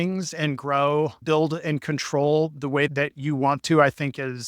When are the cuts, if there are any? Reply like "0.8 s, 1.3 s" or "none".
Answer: 2.9 s